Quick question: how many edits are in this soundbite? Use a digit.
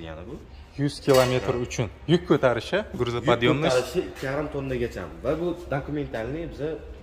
0